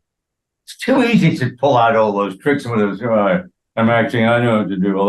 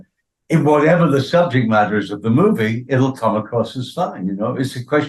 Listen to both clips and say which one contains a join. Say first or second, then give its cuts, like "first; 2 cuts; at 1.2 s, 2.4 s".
first; 1 cut; at 3.6 s